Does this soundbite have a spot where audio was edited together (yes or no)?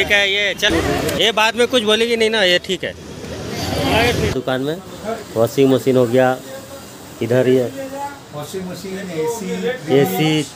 yes